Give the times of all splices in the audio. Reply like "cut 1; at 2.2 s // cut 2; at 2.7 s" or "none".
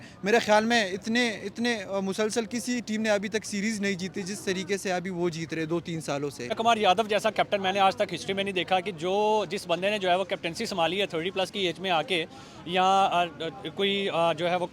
cut 1; at 6.5 s